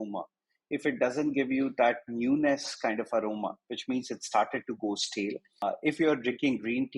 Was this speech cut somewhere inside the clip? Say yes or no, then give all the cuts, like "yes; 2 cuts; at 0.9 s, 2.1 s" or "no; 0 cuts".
yes; 1 cut; at 5.6 s